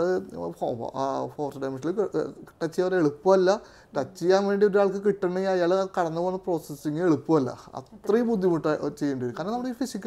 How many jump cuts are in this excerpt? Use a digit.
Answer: 0